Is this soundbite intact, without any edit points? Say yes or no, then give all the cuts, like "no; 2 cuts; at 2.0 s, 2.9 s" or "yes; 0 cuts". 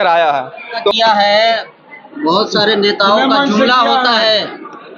no; 1 cut; at 0.9 s